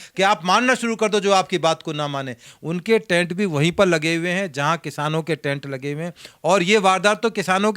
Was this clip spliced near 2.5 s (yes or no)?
yes